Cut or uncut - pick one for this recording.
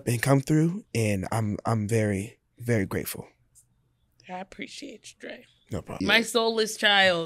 cut